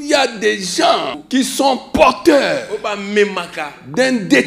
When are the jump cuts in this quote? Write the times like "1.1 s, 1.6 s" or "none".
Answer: 1.2 s